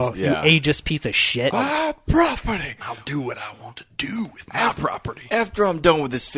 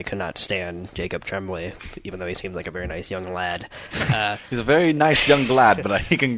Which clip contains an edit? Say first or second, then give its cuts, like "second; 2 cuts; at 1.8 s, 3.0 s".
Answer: first; 1 cut; at 1.5 s